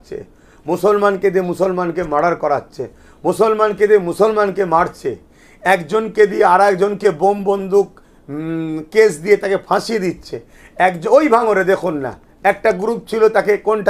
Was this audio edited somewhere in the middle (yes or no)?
no